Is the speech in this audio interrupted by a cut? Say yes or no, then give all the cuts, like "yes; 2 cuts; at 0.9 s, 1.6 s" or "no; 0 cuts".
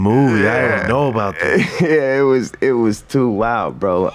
no; 0 cuts